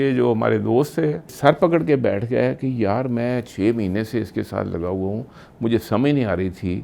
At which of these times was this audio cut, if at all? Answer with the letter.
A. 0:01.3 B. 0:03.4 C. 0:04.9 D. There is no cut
A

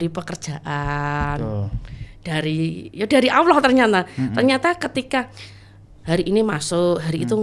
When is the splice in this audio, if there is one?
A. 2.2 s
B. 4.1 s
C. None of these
C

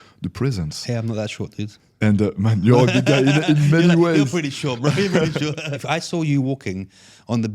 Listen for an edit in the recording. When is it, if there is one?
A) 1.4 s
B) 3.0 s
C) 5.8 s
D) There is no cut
C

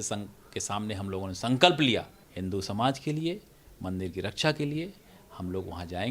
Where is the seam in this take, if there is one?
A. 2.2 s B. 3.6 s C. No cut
A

